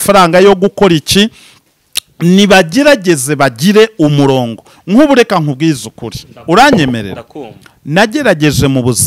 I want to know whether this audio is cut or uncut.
uncut